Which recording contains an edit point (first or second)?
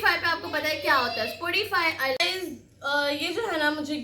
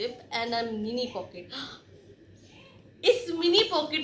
first